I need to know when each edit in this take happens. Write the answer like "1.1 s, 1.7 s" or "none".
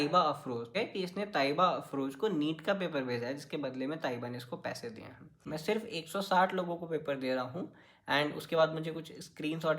5.5 s